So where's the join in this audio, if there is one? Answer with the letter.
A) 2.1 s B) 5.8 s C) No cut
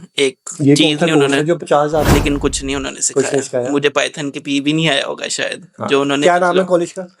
A